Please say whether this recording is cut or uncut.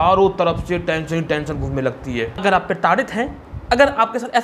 cut